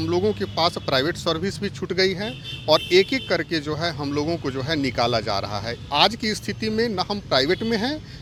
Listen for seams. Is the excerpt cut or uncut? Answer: uncut